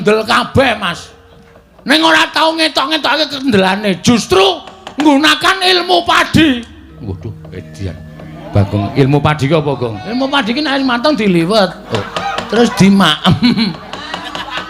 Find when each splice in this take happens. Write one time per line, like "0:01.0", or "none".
0:11.8